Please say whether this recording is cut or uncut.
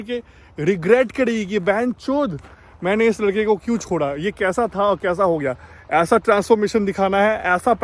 uncut